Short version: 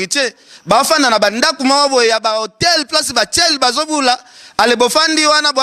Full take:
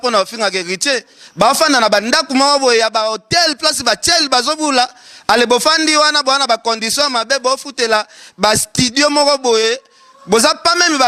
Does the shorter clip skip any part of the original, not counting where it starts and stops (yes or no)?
no